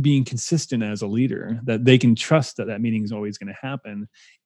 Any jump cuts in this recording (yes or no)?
no